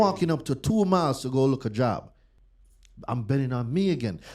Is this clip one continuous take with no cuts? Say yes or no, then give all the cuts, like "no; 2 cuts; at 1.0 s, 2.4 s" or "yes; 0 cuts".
yes; 0 cuts